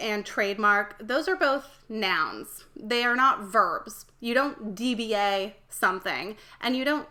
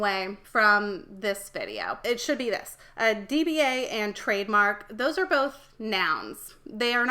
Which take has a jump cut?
second; 1 cut; at 2.0 s

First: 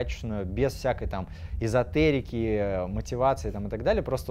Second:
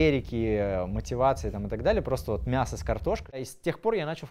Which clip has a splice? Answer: second; 1 cut; at 3.4 s

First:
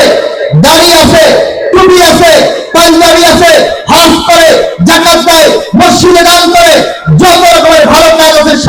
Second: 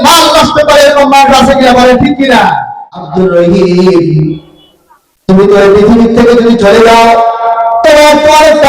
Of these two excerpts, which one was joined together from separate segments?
second; 1 cut; at 3.0 s

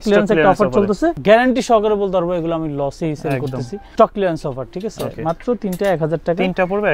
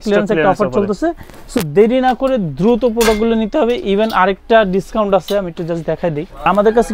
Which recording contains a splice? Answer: first; 2 cuts; at 1.2 s, 3.9 s

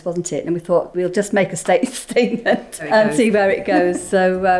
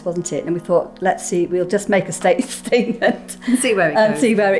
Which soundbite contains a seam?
first; 2 cuts; at 0.9 s, 2.9 s

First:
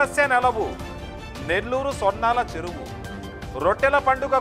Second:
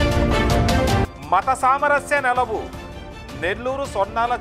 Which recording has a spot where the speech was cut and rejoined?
second; 1 cut; at 1.0 s

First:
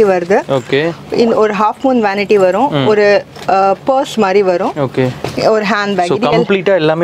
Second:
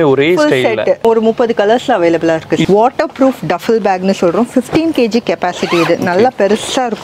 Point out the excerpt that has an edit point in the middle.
second; 2 cuts; at 1.0 s, 2.6 s

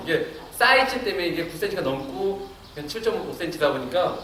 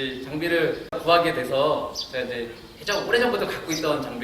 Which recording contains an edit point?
second; 1 cut; at 1.0 s

